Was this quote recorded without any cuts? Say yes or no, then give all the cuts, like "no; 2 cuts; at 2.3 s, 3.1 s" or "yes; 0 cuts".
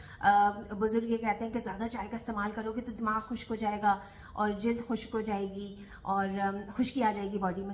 yes; 0 cuts